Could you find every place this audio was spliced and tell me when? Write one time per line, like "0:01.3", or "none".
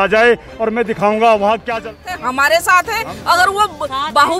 0:01.7